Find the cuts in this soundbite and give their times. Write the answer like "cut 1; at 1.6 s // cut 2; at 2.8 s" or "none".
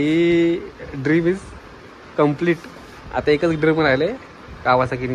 none